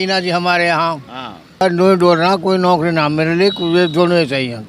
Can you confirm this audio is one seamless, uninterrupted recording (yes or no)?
no